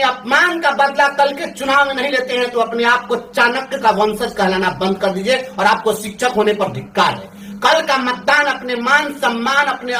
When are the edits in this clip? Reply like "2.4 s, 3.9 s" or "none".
none